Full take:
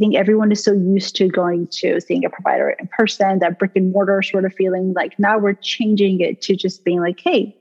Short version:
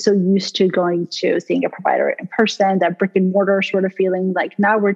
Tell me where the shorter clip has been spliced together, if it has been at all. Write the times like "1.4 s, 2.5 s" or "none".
none